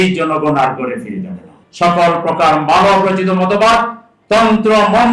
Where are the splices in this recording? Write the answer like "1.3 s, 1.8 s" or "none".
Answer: 1.6 s